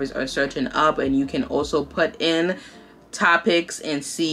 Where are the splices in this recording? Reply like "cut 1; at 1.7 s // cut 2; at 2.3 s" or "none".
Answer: none